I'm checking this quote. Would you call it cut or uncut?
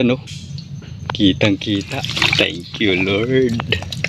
cut